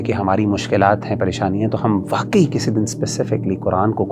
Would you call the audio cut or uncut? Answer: uncut